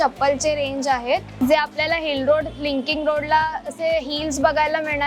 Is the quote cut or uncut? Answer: cut